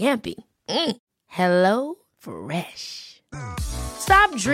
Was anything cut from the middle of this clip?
no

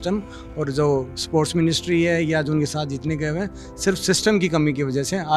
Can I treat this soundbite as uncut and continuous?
yes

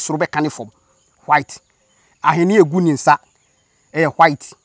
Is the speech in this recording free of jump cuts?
yes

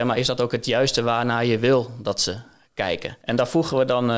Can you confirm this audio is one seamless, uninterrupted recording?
no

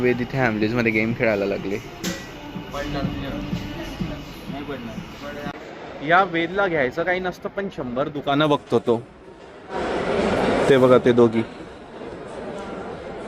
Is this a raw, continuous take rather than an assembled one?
yes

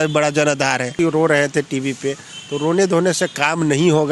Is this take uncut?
no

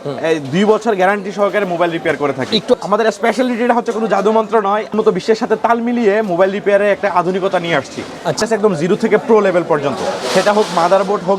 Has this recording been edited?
yes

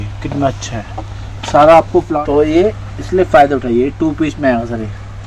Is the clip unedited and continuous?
no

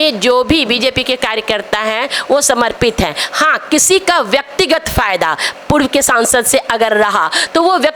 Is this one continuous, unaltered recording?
yes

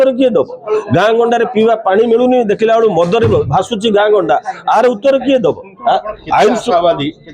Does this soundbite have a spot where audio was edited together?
no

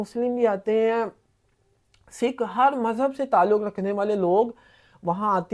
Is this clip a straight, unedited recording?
yes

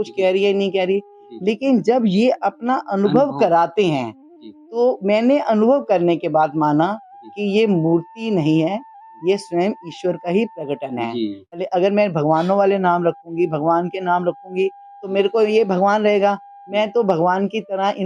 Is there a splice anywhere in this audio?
yes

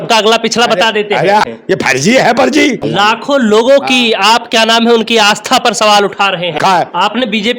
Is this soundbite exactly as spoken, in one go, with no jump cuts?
no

